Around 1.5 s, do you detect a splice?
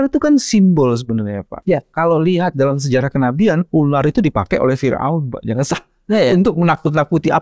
yes; 1 cut; at 1.5 s

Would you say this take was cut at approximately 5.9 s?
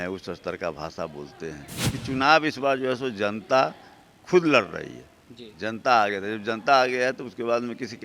no; 1 cut; at 2.0 s

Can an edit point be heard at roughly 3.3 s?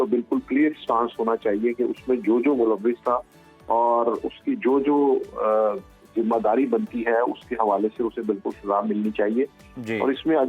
no; 0 cuts

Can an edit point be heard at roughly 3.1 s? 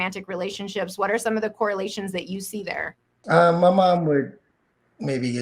yes; 1 cut; at 3.1 s

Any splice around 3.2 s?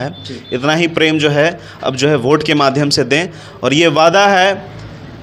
no; 0 cuts

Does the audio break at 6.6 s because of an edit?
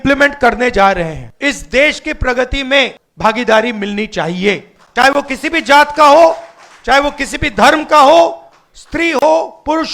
no; 2 cuts; at 1.2 s, 3.0 s

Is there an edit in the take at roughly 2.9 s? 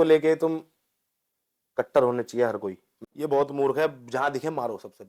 yes; 1 cut; at 2.9 s

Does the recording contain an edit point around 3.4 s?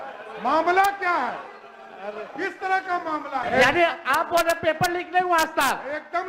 yes; 1 cut; at 3.4 s

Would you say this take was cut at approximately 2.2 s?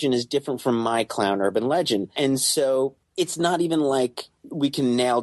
yes; 1 cut; at 2.2 s

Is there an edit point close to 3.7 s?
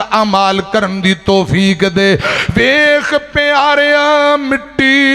no; 1 cut; at 2.4 s

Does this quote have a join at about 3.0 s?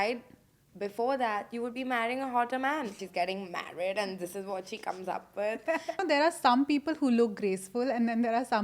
yes; 2 cuts; at 3.0 s, 6.0 s

